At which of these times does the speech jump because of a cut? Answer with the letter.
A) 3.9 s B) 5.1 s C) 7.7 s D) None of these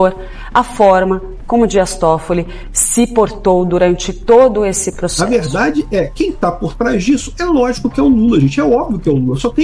B